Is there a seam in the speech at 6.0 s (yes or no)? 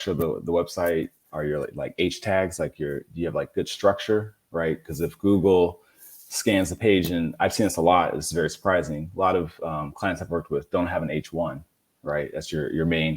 no